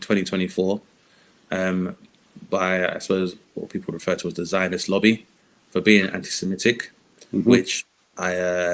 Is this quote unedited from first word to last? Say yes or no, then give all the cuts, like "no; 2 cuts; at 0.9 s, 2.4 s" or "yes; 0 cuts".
yes; 0 cuts